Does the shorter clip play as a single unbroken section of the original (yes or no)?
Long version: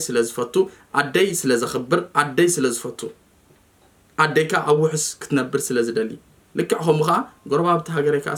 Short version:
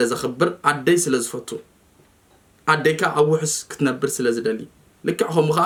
yes